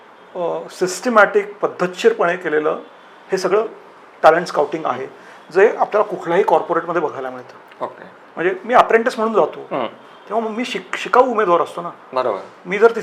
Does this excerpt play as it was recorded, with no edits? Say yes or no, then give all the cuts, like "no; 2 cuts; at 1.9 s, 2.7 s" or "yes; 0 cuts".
yes; 0 cuts